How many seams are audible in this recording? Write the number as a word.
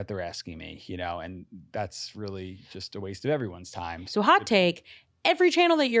one